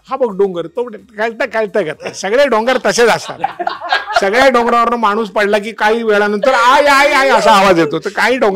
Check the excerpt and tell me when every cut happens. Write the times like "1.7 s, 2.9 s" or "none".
none